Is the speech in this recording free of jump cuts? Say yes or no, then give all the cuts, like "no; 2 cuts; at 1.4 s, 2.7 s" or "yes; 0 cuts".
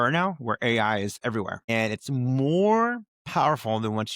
no; 2 cuts; at 1.7 s, 3.1 s